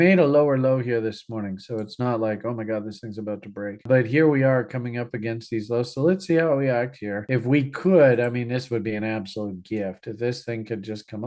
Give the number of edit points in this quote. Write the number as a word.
zero